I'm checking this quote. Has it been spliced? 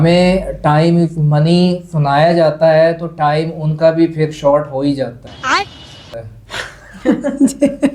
no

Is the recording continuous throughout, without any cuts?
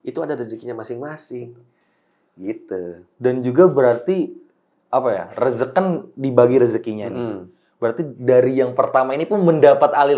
yes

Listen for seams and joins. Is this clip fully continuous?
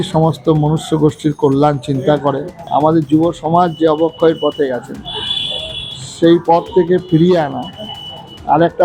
no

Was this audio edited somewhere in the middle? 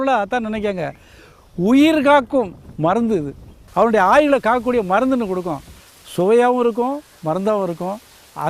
yes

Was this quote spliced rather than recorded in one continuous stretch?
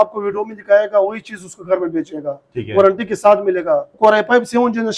yes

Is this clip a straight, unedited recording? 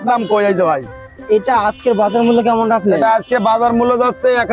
no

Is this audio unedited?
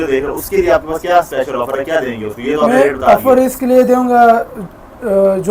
yes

